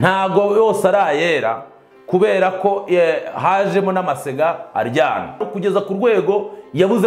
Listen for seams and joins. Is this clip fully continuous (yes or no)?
no